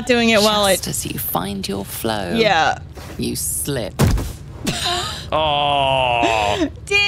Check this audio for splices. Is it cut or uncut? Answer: uncut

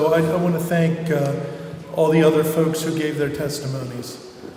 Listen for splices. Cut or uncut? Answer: uncut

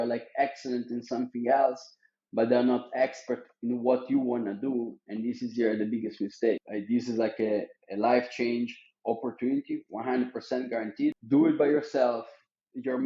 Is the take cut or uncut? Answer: cut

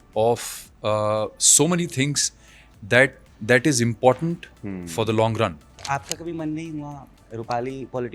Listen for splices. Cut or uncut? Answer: cut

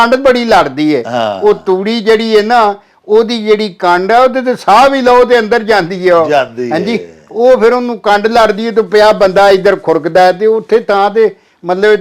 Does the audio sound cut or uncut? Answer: uncut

